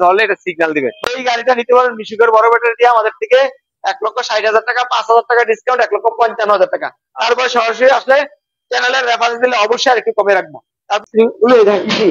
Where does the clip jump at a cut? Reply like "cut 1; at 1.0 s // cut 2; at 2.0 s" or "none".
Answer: cut 1; at 1.1 s // cut 2; at 11.0 s